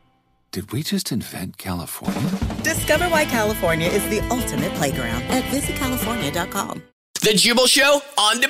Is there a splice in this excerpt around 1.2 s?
no; 1 cut; at 7.0 s

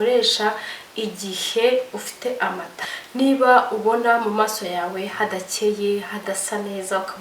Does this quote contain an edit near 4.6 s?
no; 1 cut; at 2.7 s

